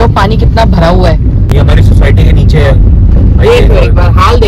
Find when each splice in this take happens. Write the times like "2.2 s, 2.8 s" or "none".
1.5 s